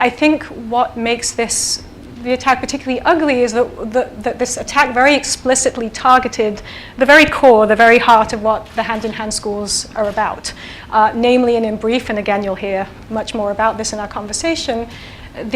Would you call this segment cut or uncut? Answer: cut